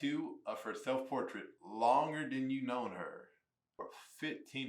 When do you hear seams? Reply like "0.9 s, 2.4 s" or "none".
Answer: 3.8 s